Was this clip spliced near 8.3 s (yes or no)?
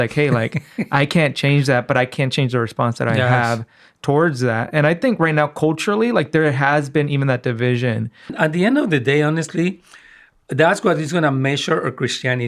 yes